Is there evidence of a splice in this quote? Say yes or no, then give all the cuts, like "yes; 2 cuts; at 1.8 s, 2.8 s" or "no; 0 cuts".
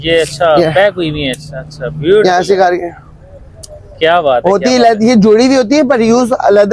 no; 0 cuts